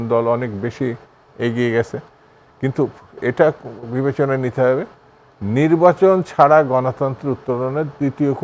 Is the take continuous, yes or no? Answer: yes